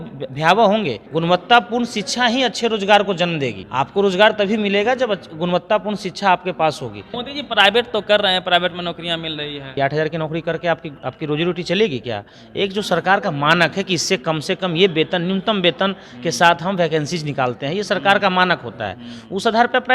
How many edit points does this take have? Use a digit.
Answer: 4